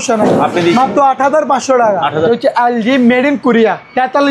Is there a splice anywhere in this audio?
yes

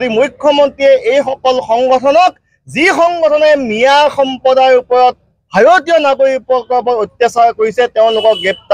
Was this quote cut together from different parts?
no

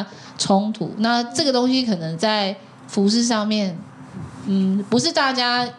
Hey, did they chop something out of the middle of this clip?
no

